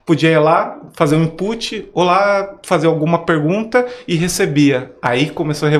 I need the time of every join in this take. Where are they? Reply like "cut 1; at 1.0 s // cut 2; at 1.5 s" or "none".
none

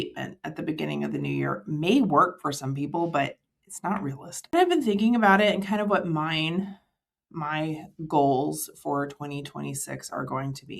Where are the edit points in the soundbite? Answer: cut 1; at 4.5 s

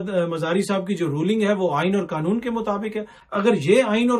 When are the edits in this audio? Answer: cut 1; at 3.1 s

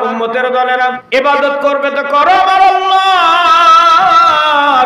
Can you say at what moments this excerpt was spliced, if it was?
cut 1; at 1.0 s

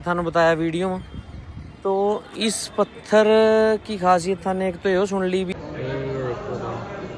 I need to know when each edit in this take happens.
cut 1; at 5.5 s

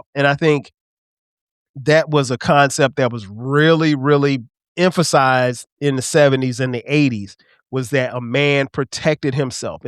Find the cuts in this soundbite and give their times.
cut 1; at 4.6 s

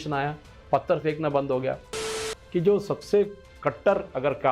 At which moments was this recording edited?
cut 1; at 2.1 s

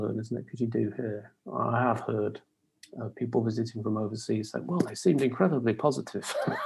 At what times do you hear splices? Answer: none

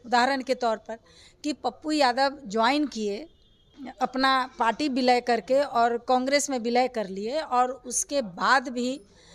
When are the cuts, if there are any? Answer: none

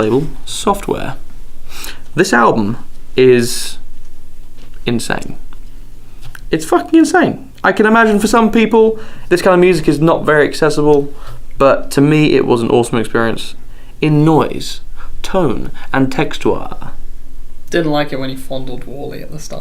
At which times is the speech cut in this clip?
cut 1; at 13.1 s

